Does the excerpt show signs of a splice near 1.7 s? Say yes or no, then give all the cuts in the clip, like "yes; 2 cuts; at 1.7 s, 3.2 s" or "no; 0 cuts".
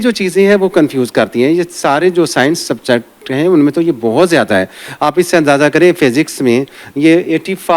no; 0 cuts